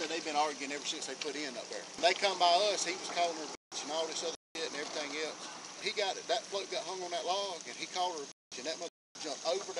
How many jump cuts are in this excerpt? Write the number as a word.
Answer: two